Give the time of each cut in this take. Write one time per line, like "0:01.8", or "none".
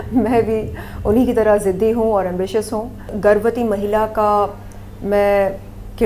0:03.1